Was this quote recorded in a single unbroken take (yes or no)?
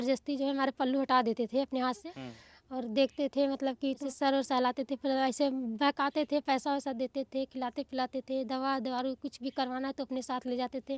no